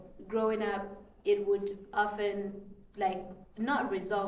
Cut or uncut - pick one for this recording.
uncut